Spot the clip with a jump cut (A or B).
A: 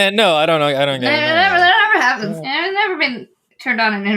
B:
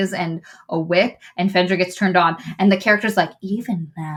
A